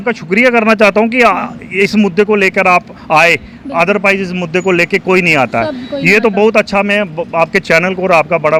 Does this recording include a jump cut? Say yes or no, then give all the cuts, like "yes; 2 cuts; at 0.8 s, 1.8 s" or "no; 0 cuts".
no; 0 cuts